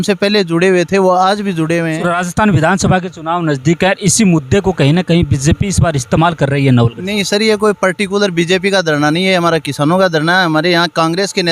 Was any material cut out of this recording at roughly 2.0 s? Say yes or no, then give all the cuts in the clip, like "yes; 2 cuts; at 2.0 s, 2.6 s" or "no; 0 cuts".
yes; 1 cut; at 2.0 s